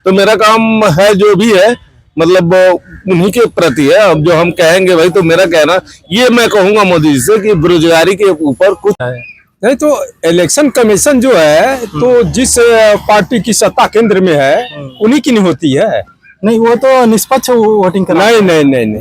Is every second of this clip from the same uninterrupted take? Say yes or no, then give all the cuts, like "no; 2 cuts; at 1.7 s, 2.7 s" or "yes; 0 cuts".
no; 1 cut; at 9.1 s